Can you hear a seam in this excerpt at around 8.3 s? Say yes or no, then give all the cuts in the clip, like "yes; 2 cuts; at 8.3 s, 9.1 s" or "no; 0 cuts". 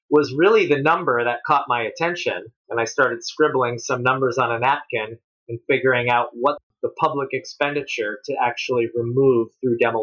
no; 2 cuts; at 2.5 s, 6.6 s